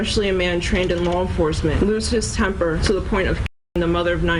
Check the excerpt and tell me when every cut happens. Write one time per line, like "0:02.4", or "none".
0:01.8
0:02.8